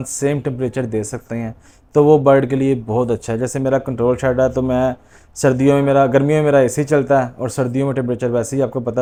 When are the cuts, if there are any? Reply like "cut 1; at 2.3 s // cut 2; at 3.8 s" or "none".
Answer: none